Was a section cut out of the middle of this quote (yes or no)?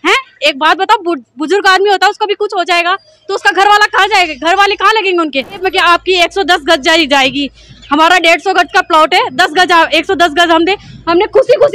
yes